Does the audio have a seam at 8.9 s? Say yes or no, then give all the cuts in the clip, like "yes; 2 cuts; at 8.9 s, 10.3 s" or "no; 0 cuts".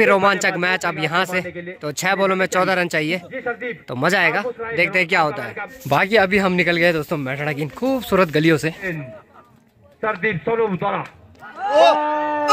yes; 2 cuts; at 5.9 s, 8.9 s